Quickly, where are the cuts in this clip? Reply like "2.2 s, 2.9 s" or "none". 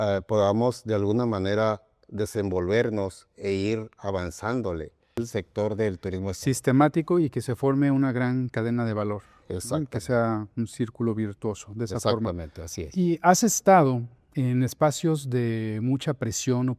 5.2 s